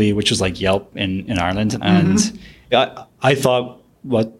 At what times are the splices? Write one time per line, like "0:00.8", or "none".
0:01.7
0:02.7